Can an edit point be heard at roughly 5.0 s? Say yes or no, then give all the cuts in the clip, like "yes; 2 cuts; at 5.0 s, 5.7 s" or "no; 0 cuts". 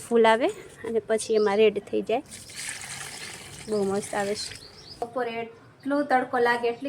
yes; 1 cut; at 5.0 s